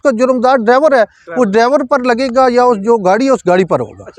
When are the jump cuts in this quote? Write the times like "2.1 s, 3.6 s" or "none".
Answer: none